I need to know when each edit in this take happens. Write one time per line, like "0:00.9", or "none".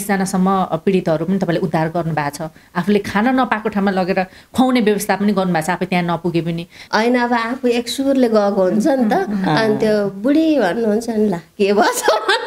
0:06.8